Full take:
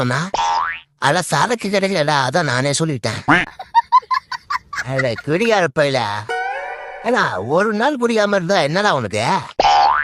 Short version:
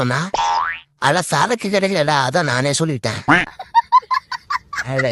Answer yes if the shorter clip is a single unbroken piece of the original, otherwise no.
yes